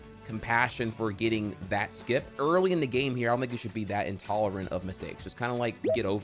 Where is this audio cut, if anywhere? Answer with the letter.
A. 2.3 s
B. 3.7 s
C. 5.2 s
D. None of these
A